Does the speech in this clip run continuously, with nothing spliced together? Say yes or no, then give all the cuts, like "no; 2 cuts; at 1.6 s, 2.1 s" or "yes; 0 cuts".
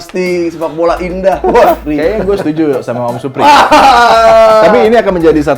no; 1 cut; at 1.8 s